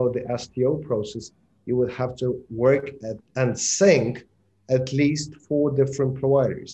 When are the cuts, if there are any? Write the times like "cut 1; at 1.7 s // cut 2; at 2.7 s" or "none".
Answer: none

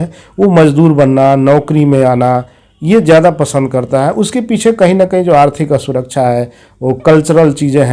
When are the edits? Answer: none

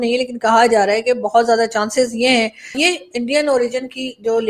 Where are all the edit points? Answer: cut 1; at 2.8 s

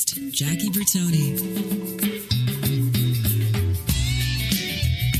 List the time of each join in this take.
none

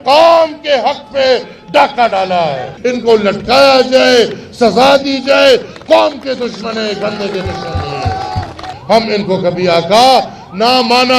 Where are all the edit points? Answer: cut 1; at 2.7 s // cut 2; at 8.7 s

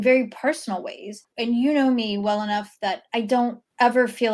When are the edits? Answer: cut 1; at 1.2 s // cut 2; at 3.3 s

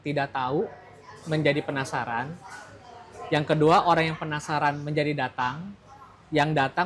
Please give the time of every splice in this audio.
none

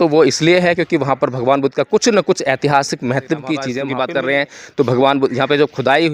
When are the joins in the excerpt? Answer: cut 1; at 3.8 s

